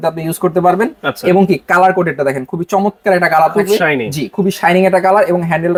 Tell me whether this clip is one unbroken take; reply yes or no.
yes